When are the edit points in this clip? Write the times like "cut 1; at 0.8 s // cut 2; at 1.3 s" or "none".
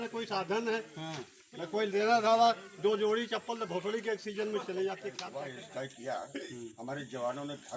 cut 1; at 5.2 s